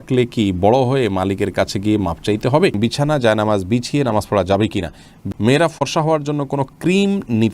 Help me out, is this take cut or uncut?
cut